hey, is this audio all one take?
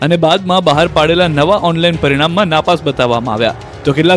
yes; 0 cuts

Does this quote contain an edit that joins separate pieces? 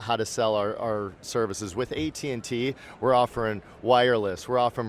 no; 0 cuts

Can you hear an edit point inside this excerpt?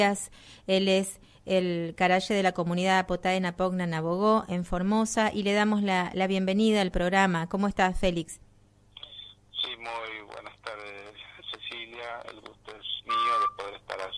yes; 1 cut; at 12.2 s

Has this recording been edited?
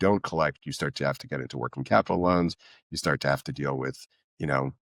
no; 0 cuts

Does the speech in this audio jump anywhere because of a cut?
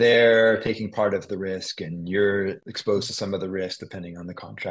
yes; 1 cut; at 2.7 s

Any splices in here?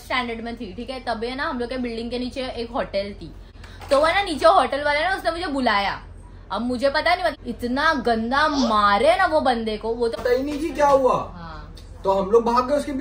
yes; 3 cuts; at 3.6 s, 7.4 s, 10.1 s

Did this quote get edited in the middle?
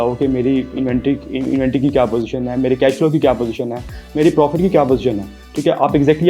no; 0 cuts

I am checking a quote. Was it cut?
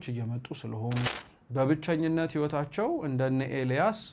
yes; 1 cut; at 1.2 s

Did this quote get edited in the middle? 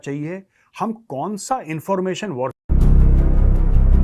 yes; 1 cut; at 2.7 s

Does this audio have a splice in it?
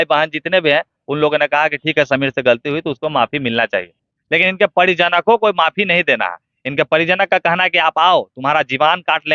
no; 0 cuts

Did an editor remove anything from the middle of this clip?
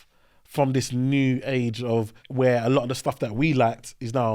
yes; 1 cut; at 2.2 s

